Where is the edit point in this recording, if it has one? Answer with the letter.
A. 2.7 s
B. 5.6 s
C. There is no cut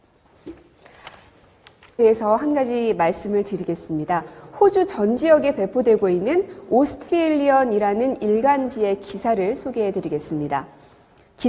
B